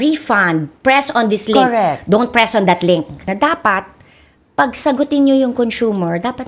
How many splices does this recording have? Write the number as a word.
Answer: one